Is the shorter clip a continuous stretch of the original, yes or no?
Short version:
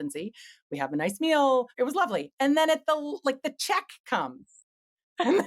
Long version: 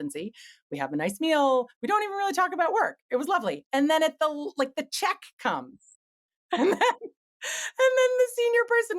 no